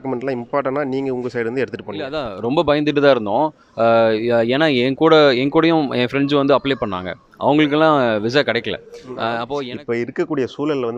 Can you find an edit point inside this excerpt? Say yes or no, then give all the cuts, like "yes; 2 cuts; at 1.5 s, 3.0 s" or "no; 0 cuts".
yes; 2 cuts; at 2.3 s, 9.4 s